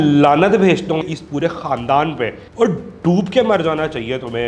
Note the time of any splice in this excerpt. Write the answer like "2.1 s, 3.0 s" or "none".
1.0 s, 2.4 s